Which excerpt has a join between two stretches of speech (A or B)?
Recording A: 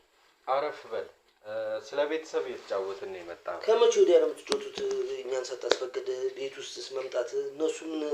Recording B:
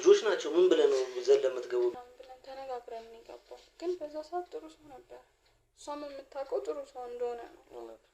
B